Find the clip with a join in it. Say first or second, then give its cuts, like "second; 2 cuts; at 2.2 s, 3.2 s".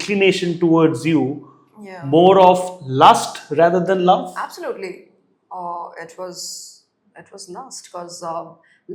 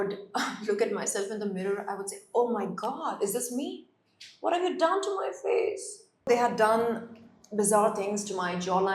second; 1 cut; at 6.3 s